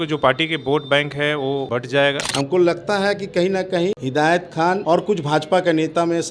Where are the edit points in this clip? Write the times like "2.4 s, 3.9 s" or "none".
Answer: 2.0 s, 4.0 s, 4.8 s